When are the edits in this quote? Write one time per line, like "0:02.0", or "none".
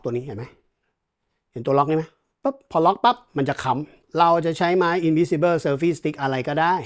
0:04.0